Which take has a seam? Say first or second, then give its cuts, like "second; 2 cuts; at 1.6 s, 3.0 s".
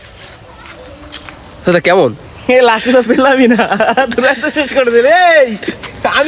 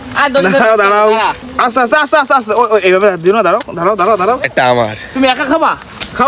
second; 1 cut; at 1.5 s